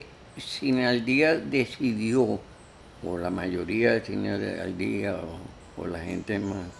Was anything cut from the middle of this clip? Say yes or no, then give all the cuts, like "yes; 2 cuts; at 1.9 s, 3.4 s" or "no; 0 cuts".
no; 0 cuts